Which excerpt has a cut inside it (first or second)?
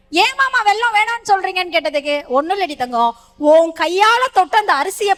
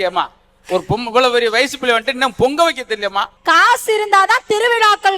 second